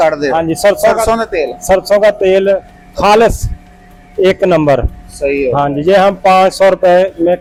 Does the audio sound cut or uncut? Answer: uncut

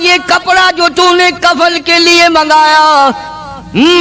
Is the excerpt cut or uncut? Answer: uncut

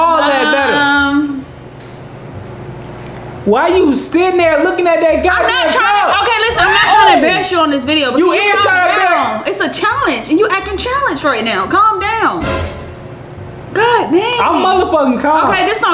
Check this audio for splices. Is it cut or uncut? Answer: uncut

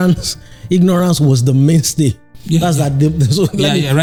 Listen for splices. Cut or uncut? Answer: uncut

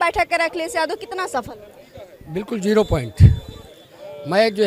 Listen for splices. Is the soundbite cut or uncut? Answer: uncut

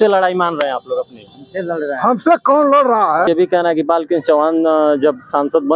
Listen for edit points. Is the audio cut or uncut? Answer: cut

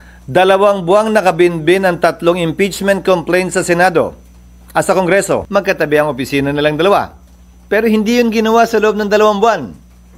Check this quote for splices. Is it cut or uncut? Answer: cut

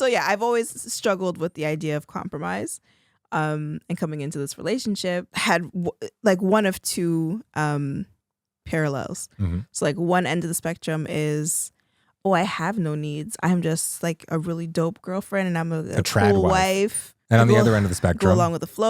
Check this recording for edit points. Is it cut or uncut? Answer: cut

